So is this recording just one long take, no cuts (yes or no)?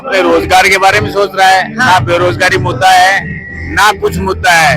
yes